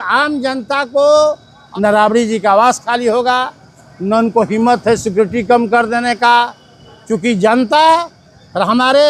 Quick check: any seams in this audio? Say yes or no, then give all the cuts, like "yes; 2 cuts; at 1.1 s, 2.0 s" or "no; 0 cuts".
no; 0 cuts